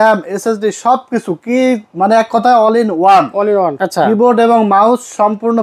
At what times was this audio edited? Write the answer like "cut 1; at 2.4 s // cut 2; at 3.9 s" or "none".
cut 1; at 3.8 s